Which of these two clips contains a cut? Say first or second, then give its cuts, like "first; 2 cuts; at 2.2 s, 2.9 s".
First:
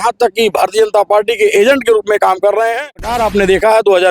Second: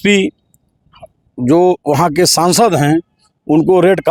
first; 1 cut; at 3.2 s